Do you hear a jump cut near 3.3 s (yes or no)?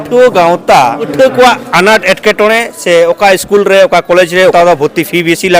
no